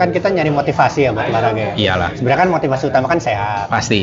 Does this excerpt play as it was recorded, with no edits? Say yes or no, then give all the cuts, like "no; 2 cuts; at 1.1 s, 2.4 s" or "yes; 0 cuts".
yes; 0 cuts